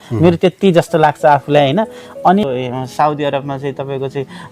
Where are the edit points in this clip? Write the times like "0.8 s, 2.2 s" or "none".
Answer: 2.4 s

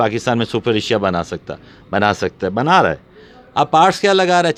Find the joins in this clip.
none

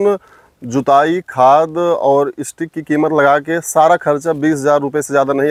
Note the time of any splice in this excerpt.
none

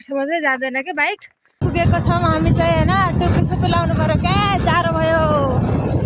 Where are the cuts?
1.6 s

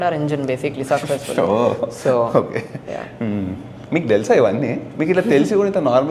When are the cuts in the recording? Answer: none

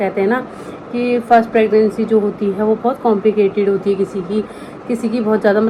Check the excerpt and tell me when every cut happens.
none

